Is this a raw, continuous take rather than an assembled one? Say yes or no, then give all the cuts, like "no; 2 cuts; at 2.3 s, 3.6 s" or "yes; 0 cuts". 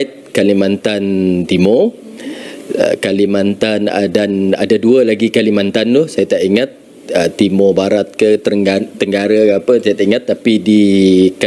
yes; 0 cuts